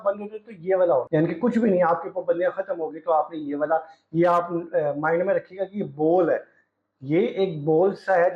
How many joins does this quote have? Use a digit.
1